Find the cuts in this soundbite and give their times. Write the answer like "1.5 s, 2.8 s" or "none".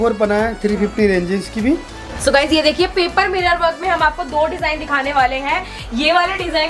none